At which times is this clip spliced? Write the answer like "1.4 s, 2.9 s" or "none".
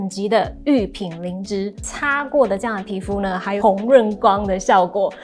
1.9 s, 3.6 s